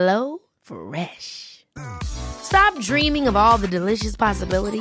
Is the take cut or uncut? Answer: uncut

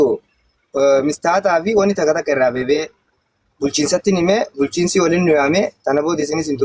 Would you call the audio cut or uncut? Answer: uncut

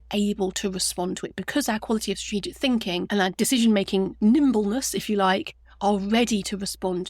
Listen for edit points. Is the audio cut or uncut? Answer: cut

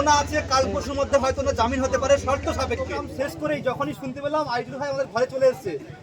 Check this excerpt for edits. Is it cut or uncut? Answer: cut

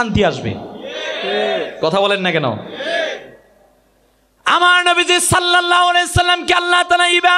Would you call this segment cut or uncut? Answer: uncut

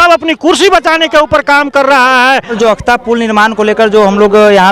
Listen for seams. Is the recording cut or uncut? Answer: cut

